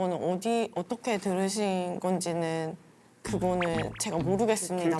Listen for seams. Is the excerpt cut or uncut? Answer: uncut